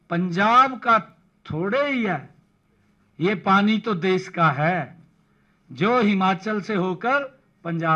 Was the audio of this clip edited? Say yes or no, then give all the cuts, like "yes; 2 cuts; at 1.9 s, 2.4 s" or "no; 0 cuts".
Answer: no; 0 cuts